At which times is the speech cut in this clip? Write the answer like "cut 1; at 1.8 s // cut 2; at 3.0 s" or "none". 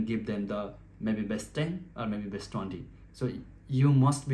none